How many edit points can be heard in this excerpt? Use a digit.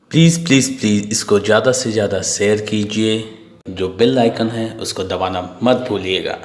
1